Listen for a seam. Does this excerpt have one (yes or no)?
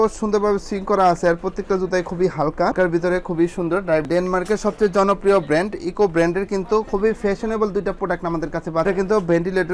yes